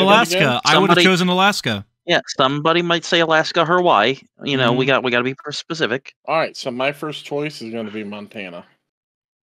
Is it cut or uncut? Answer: cut